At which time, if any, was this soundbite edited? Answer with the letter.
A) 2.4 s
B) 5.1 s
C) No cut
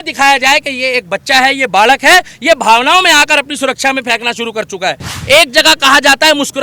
B